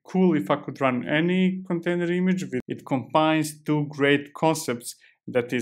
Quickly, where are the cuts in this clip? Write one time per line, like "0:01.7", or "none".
0:02.7